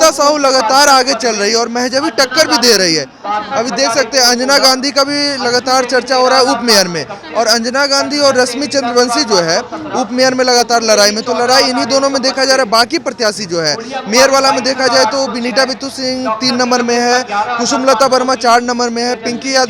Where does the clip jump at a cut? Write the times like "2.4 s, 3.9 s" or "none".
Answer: none

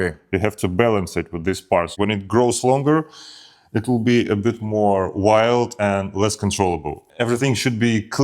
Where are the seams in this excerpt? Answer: 1.9 s, 7.0 s

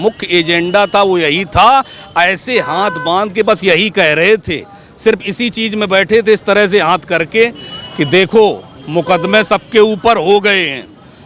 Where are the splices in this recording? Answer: none

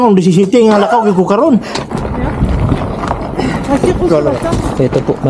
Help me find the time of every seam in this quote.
1.9 s

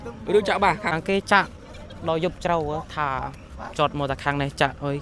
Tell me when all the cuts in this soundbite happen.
0.9 s

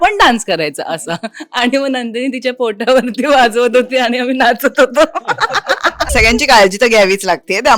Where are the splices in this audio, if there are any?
6.1 s

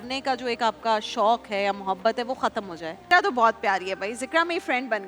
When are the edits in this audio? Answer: 2.9 s

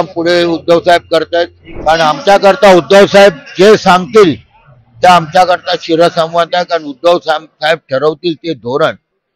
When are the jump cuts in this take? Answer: 1.6 s

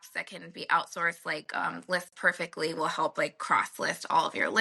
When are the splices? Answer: none

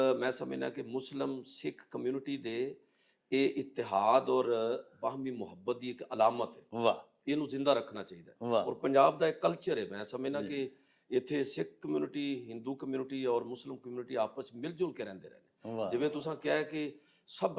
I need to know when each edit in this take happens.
none

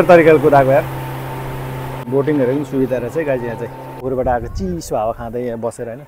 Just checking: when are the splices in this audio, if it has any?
1.9 s, 4.0 s

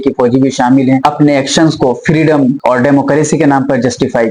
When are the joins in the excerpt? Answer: 1.0 s

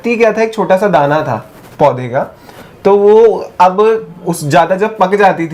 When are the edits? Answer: none

